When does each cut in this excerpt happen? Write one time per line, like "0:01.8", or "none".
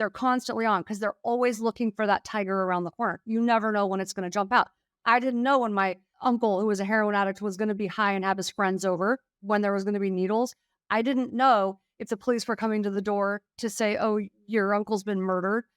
0:06.1